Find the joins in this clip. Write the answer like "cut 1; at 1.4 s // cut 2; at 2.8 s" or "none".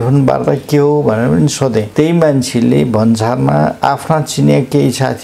cut 1; at 1.9 s